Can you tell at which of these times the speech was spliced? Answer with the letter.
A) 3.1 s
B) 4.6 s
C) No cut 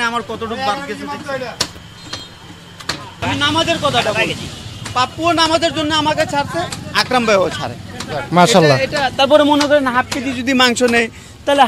A